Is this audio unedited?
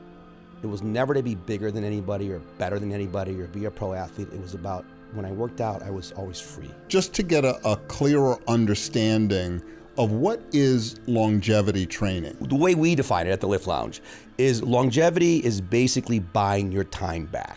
no; 2 cuts; at 6.8 s, 12.4 s

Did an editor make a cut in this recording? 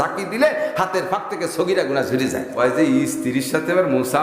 yes; 1 cut; at 2.5 s

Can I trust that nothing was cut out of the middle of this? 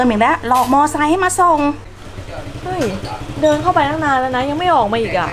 no; 1 cut; at 1.9 s

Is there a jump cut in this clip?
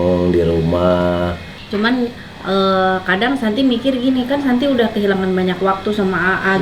yes; 1 cut; at 1.6 s

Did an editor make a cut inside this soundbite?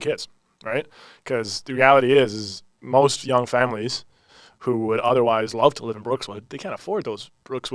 no; 0 cuts

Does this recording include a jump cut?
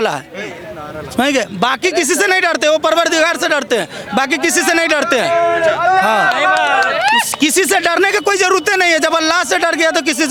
no; 0 cuts

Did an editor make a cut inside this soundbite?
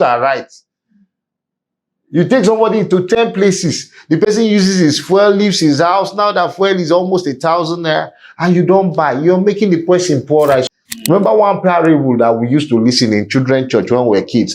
yes; 1 cut; at 10.6 s

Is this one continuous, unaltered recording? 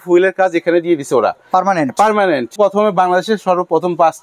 no; 1 cut; at 2.5 s

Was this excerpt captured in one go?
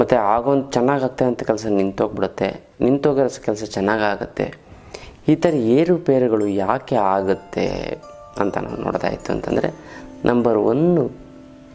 yes; 0 cuts

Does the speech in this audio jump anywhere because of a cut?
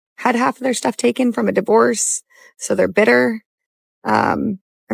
no; 0 cuts

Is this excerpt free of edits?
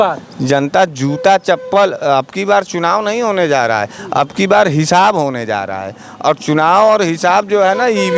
yes; 0 cuts

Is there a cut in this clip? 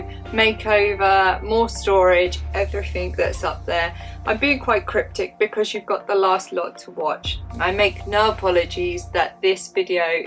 no; 0 cuts

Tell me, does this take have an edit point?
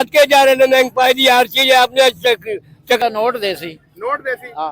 yes; 1 cut; at 3.0 s

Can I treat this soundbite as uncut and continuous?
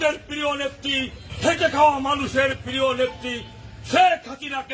no; 1 cut; at 1.2 s

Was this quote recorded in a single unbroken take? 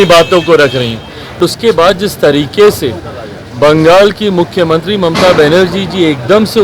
no; 1 cut; at 1.4 s

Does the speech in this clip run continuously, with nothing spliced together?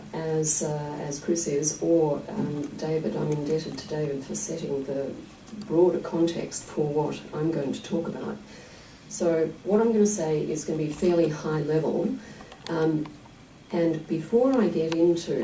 yes; 0 cuts

